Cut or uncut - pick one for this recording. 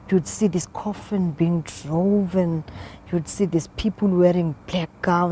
cut